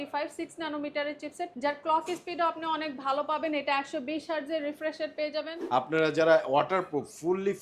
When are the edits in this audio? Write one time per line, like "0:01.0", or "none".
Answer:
0:01.5
0:05.6